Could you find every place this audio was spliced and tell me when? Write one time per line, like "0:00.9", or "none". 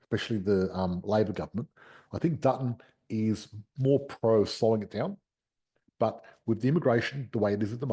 none